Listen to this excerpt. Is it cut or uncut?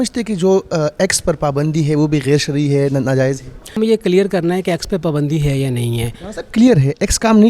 cut